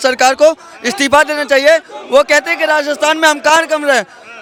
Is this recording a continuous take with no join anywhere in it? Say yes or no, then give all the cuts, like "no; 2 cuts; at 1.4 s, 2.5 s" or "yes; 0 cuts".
yes; 0 cuts